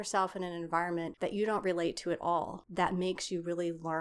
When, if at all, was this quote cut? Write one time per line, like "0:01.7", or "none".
0:01.1
0:02.6